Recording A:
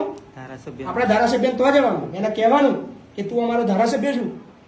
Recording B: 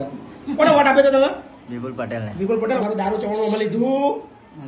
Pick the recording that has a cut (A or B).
B